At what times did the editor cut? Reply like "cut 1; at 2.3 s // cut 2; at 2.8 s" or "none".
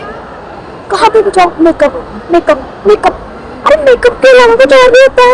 none